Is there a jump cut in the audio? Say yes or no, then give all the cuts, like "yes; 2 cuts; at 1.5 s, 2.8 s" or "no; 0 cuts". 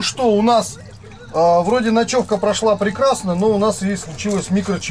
no; 0 cuts